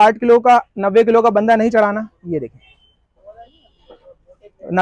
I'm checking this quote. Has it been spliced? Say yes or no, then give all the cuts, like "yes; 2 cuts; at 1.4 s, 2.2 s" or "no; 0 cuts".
no; 0 cuts